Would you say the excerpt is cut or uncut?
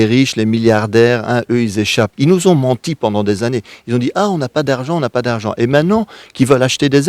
cut